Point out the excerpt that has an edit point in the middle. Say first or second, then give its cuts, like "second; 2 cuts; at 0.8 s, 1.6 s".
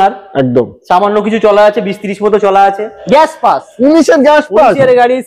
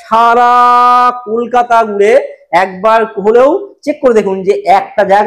first; 1 cut; at 3.0 s